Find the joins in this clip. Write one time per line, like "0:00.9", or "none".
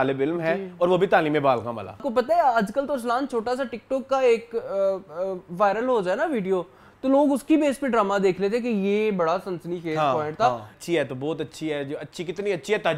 0:02.0
0:10.7